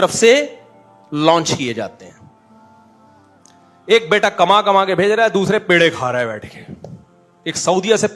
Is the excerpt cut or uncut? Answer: uncut